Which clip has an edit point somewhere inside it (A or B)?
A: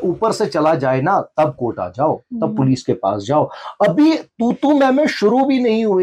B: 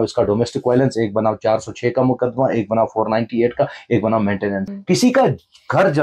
B